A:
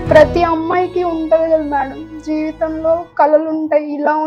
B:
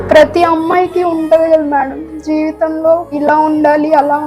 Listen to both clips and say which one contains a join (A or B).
B